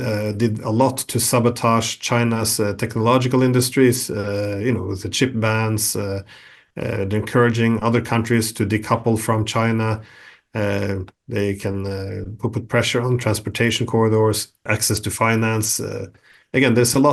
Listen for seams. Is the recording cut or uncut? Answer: uncut